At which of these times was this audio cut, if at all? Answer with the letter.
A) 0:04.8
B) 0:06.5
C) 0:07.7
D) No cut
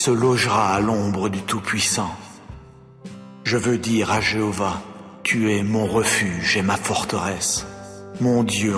D